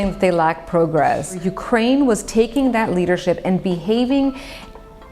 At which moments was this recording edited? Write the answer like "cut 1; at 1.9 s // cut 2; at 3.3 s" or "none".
cut 1; at 1.5 s